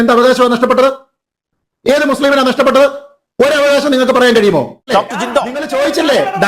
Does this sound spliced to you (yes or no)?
yes